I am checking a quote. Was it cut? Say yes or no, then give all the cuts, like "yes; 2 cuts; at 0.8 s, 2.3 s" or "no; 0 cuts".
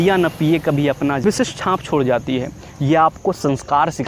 yes; 1 cut; at 1.2 s